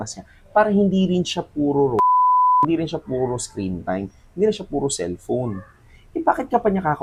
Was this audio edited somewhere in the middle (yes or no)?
no